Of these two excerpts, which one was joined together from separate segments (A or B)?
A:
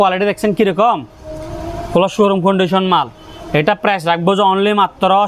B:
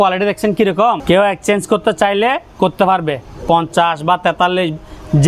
B